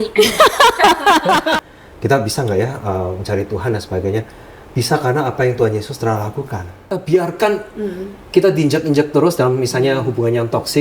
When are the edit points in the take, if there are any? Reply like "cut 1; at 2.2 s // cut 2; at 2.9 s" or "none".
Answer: cut 1; at 1.6 s // cut 2; at 6.9 s

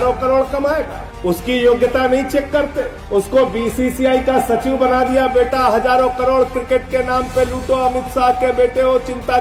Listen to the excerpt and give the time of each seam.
none

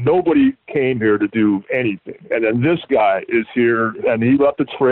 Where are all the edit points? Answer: cut 1; at 2.1 s // cut 2; at 4.0 s

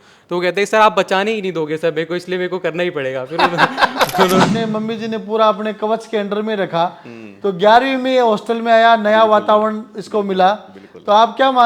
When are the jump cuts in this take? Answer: cut 1; at 4.5 s

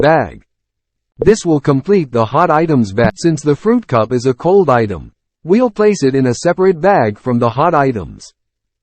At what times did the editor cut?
cut 1; at 3.2 s

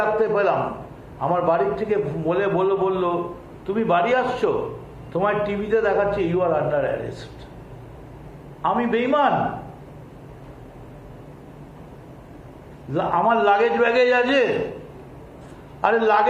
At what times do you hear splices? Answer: cut 1; at 8.3 s

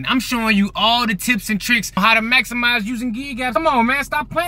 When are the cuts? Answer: cut 1; at 3.5 s

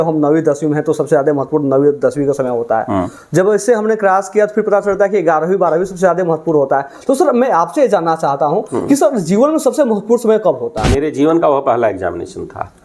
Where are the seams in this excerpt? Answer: cut 1; at 10.9 s

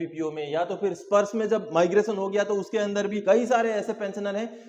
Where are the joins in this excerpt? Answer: cut 1; at 3.2 s

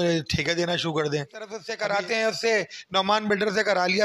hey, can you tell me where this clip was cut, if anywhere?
cut 1; at 1.9 s

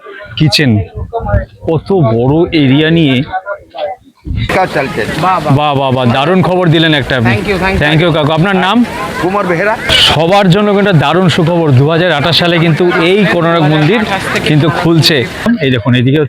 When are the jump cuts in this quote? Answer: cut 1; at 4.5 s // cut 2; at 9.9 s // cut 3; at 15.4 s

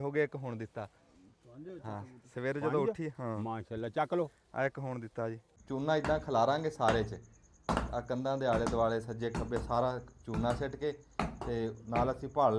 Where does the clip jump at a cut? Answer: cut 1; at 5.5 s

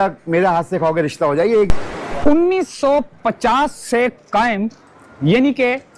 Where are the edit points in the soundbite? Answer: cut 1; at 1.7 s

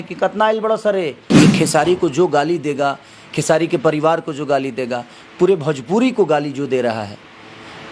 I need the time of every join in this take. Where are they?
cut 1; at 1.2 s

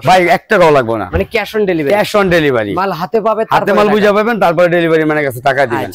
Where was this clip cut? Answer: none

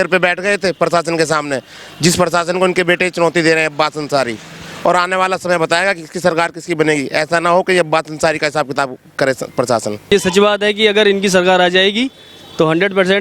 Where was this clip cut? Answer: cut 1; at 10.1 s

